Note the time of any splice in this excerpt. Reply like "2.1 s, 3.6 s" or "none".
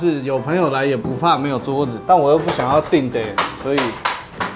none